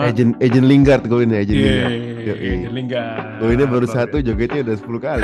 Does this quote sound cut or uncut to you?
uncut